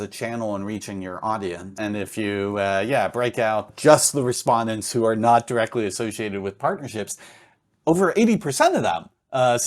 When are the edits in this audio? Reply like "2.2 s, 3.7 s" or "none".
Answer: 1.8 s, 3.7 s

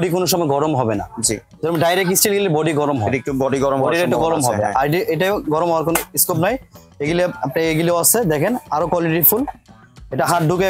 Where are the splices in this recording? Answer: none

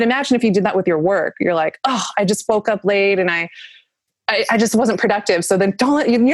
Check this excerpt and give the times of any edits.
none

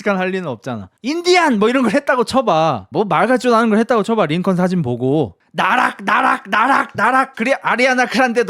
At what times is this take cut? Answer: 0.9 s, 5.4 s

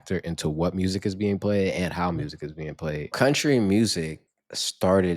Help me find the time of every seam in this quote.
3.1 s

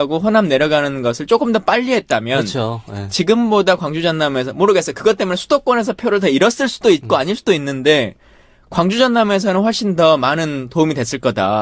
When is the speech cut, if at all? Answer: none

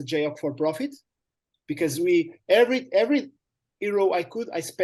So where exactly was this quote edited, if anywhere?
none

